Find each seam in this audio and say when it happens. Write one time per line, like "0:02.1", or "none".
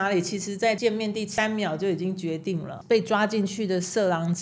0:00.9
0:02.7

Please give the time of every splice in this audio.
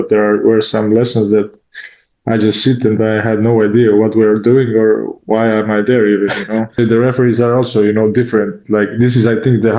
0:06.8

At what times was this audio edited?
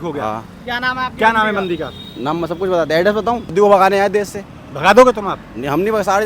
0:03.5

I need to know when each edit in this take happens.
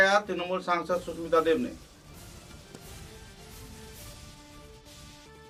none

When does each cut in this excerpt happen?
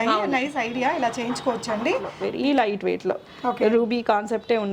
0:02.2

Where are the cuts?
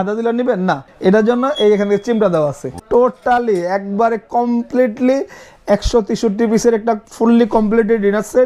0:00.9
0:02.8

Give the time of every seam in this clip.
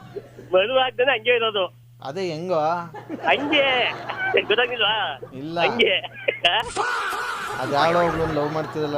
0:07.0

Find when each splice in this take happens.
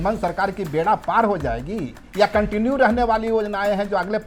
none

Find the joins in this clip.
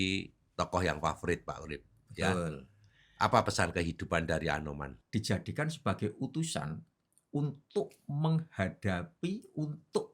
0:04.9

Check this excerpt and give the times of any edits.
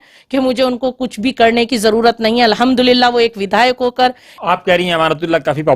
0:04.3

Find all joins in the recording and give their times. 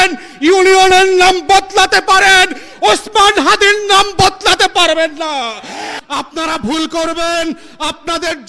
0:05.9

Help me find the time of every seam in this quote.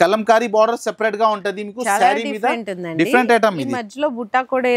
none

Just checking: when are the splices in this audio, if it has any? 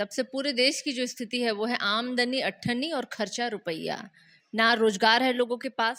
none

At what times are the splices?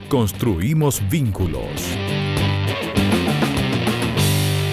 0:01.9

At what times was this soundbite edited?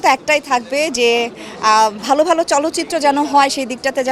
none

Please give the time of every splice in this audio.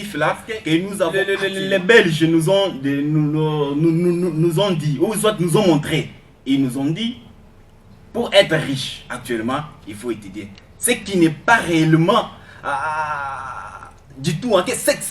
0:01.2

